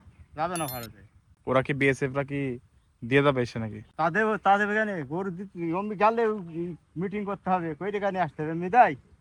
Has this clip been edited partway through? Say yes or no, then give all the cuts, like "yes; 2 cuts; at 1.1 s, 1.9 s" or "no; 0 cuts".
no; 0 cuts